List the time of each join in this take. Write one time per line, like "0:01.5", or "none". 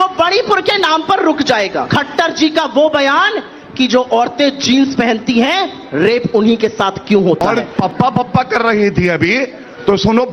0:01.8
0:07.5